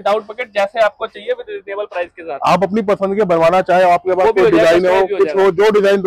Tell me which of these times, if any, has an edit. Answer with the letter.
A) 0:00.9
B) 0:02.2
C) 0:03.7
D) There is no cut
D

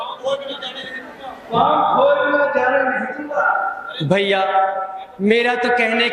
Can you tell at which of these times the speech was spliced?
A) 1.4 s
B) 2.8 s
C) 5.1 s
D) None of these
D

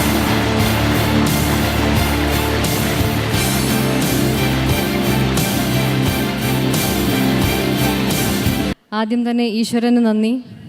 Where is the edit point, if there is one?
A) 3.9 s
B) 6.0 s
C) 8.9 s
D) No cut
A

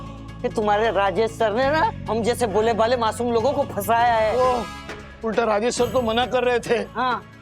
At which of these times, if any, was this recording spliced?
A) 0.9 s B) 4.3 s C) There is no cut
B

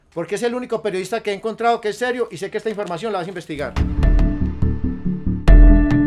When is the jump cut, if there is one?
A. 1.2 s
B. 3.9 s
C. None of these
C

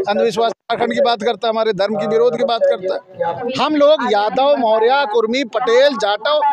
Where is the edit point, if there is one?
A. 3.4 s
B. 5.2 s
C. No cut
A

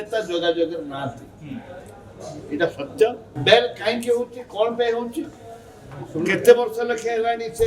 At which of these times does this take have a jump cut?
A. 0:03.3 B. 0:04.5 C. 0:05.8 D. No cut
A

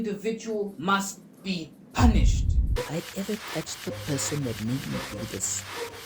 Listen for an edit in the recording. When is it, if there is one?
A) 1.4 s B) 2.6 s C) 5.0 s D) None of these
B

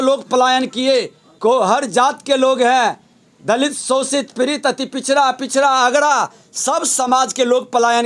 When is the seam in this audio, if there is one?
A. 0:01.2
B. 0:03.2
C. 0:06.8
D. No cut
A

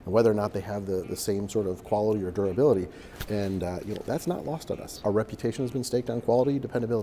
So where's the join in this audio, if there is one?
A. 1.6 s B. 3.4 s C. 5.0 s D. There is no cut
C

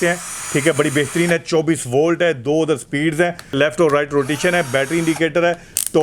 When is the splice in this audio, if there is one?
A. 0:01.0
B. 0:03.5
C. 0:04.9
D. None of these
B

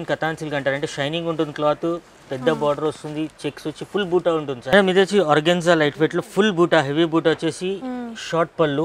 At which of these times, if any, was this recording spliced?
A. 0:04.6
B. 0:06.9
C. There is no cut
A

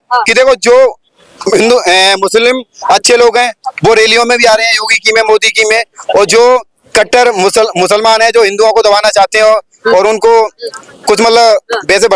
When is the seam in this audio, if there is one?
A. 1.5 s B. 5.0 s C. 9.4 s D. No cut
D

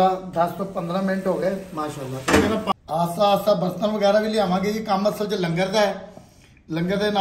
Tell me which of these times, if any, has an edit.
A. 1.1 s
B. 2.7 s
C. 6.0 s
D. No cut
B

